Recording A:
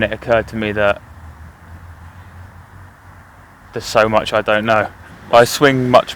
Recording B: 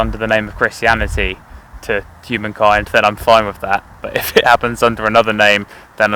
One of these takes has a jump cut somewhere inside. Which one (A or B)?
A